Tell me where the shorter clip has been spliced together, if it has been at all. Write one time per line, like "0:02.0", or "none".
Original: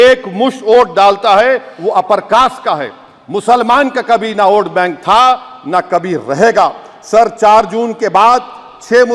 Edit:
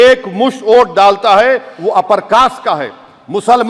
none